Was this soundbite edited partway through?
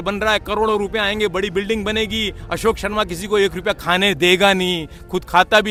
no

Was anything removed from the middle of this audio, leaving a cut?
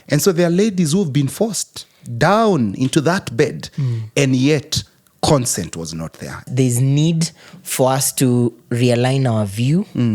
yes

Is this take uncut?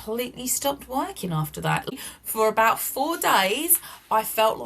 no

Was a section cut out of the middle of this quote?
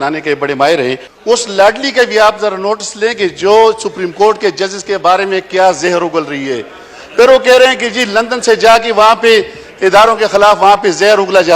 yes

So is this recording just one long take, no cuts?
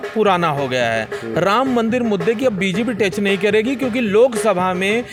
yes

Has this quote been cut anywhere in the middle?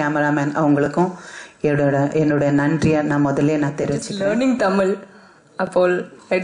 yes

